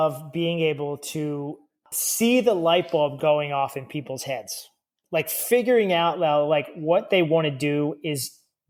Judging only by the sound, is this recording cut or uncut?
uncut